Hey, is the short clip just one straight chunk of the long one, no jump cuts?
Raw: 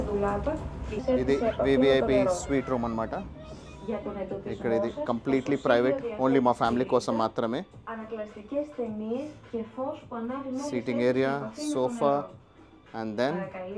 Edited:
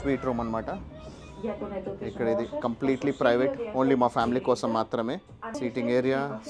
no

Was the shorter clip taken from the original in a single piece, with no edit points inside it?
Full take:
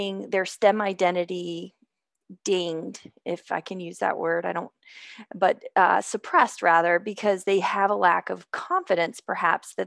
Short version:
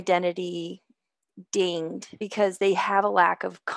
no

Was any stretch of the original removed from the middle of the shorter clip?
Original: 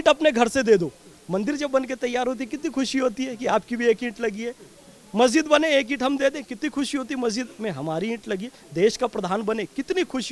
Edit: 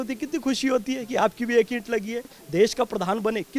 yes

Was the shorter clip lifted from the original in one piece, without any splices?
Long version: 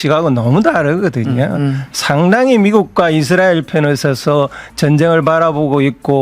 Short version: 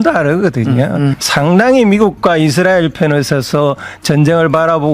no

